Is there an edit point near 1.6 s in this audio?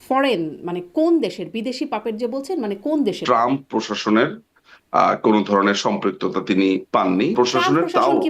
no; 2 cuts; at 3.2 s, 7.3 s

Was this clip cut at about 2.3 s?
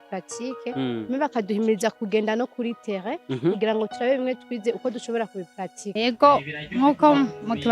no; 1 cut; at 6.0 s

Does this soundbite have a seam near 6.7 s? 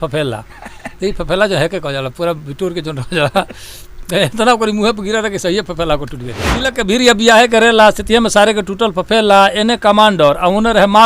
yes; 1 cut; at 6.7 s

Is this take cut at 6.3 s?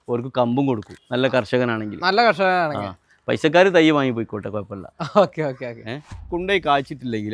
yes; 2 cuts; at 0.9 s, 6.3 s

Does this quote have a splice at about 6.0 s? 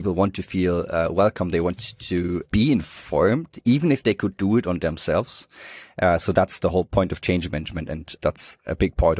no; 2 cuts; at 2.4 s, 8.1 s

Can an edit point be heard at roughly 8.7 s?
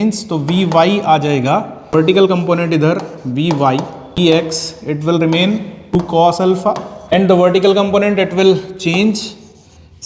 no; 4 cuts; at 2.1 s, 4.2 s, 6.0 s, 7.1 s

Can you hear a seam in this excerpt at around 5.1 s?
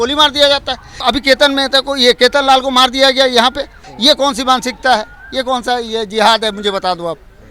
no; 2 cuts; at 1.0 s, 3.8 s

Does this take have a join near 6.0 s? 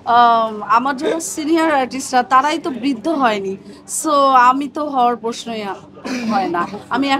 no; 0 cuts

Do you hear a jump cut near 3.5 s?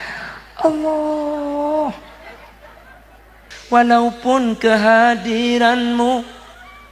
yes; 1 cut; at 3.5 s

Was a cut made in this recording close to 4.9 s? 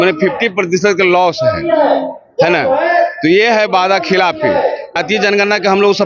yes; 1 cut; at 4.9 s

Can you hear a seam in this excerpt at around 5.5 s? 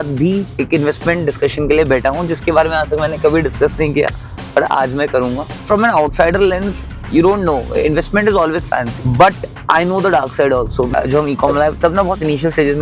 yes; 3 cuts; at 5.5 s, 8.9 s, 10.9 s

